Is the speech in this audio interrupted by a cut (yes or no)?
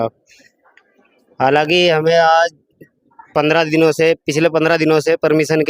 no